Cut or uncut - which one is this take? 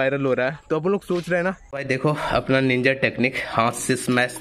cut